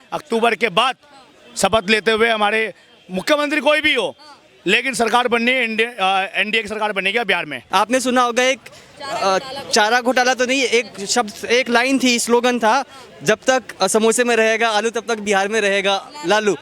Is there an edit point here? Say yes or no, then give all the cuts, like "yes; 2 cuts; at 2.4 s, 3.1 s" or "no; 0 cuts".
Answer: yes; 1 cut; at 7.5 s